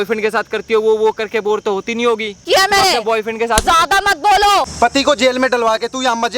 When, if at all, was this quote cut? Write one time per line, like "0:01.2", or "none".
0:02.4
0:04.7